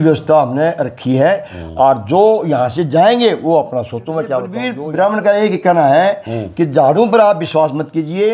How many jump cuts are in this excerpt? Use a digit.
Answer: 1